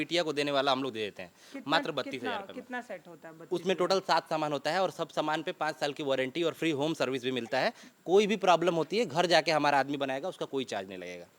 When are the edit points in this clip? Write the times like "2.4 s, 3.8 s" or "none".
none